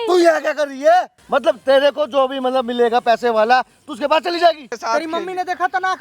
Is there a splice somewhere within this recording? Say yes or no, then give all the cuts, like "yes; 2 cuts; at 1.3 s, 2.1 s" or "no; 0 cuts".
yes; 2 cuts; at 1.2 s, 4.7 s